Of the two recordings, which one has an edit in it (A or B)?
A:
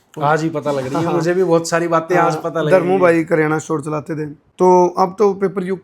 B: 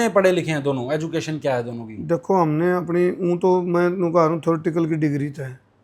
A